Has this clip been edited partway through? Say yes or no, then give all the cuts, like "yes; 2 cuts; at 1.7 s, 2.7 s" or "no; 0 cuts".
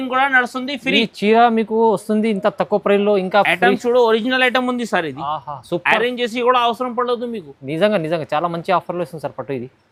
no; 0 cuts